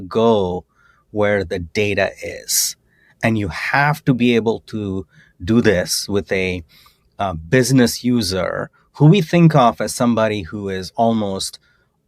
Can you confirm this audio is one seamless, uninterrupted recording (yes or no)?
yes